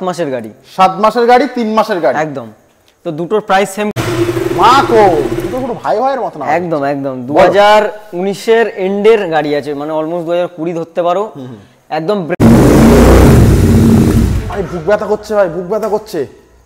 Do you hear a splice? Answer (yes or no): yes